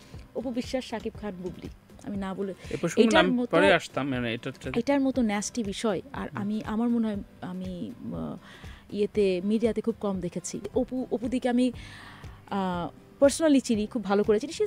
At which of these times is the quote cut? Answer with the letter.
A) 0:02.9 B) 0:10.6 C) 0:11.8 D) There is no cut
B